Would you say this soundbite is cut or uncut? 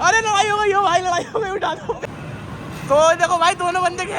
cut